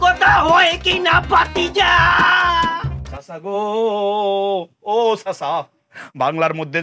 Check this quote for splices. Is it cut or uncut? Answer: uncut